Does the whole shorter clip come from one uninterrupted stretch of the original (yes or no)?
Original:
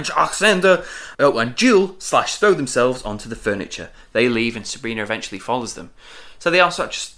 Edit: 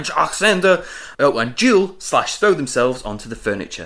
yes